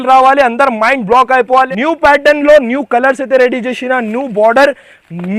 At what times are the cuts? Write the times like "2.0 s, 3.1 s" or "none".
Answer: 1.7 s

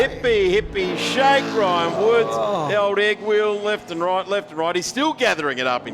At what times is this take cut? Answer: none

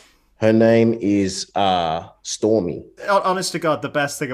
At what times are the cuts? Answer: 2.9 s

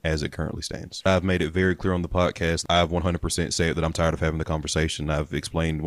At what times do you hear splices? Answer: 1.1 s, 2.6 s

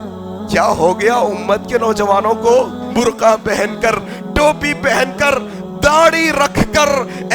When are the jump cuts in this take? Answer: 2.8 s

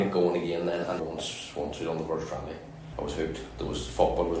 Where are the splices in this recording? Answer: 1.0 s, 2.8 s

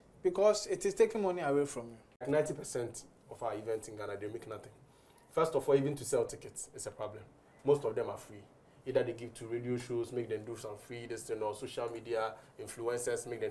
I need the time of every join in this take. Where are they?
2.2 s

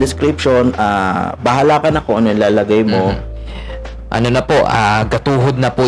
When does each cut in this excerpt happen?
3.3 s

